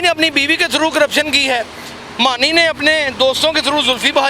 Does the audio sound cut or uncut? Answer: uncut